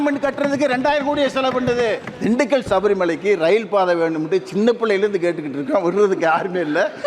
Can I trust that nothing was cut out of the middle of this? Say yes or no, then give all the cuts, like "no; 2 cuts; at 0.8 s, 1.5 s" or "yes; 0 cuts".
no; 1 cut; at 2.1 s